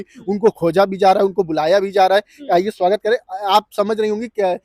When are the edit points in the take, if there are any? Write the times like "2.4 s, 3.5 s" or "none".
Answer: none